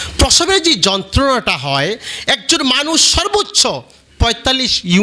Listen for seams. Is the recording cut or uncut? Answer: uncut